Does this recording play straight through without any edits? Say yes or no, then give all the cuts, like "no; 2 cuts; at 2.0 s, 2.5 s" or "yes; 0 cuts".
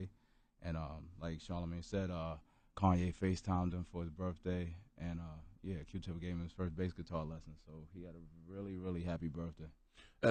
yes; 0 cuts